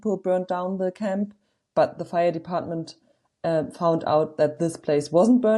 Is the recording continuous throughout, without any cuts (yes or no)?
yes